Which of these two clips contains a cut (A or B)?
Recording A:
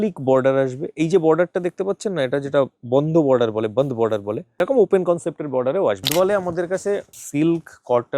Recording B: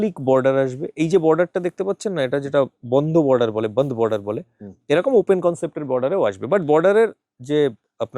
A